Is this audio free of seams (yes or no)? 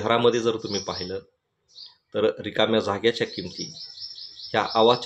yes